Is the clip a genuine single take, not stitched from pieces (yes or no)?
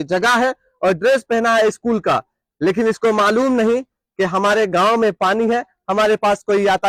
yes